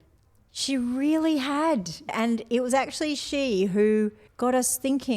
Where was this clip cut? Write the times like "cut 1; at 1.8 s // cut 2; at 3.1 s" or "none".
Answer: cut 1; at 2.1 s // cut 2; at 4.2 s

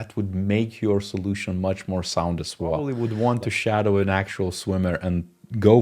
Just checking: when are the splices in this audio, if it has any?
cut 1; at 2.9 s

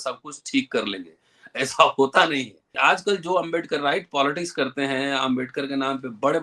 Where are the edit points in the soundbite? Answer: cut 1; at 2.6 s

